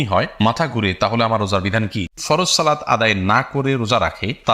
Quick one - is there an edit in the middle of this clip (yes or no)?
yes